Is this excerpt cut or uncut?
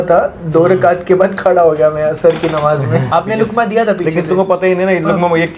cut